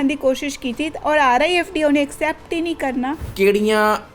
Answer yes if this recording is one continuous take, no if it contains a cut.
no